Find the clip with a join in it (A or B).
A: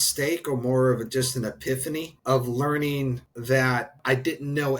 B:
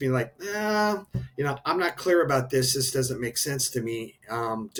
A